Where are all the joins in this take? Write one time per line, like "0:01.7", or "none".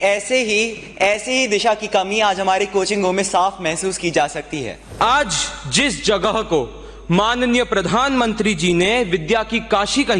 0:04.8